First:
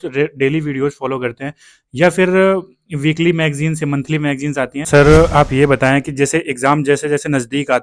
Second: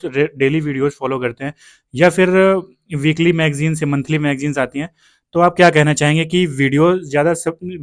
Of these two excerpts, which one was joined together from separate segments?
first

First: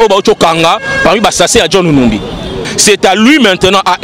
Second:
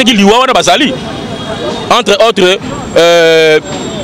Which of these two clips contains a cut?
first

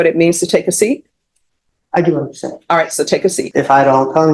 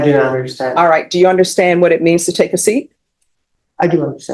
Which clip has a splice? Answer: first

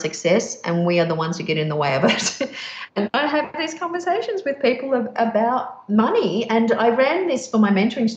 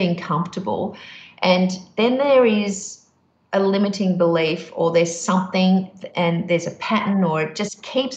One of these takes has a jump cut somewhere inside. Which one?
first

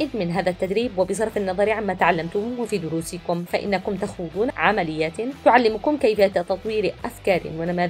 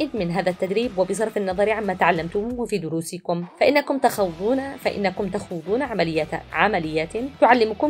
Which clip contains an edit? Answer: first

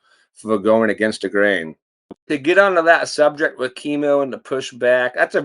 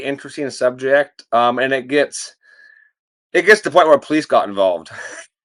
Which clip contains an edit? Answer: first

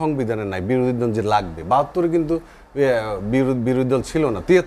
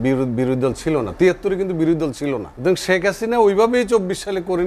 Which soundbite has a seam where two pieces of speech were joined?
second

